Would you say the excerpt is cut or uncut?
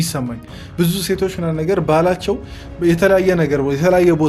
uncut